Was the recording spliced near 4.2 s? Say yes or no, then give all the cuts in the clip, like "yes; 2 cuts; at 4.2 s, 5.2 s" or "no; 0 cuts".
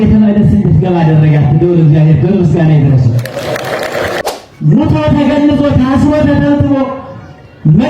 yes; 1 cut; at 4.2 s